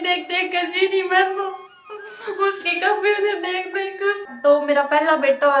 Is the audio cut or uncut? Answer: cut